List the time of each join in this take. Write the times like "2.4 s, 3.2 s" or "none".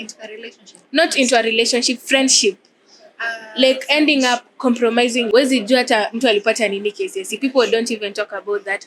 5.3 s